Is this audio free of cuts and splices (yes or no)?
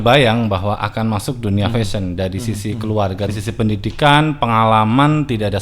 no